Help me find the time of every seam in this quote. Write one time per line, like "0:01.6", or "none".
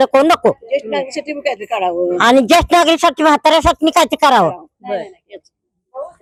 none